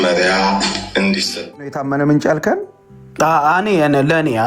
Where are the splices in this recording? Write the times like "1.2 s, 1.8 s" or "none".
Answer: 1.7 s